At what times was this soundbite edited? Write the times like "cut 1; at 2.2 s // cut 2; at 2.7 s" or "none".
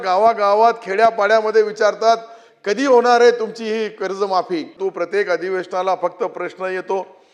cut 1; at 4.7 s